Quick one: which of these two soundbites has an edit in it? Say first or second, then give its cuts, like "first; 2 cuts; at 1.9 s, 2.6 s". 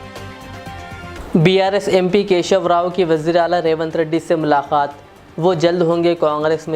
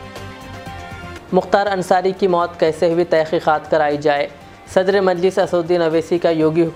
first; 1 cut; at 1.1 s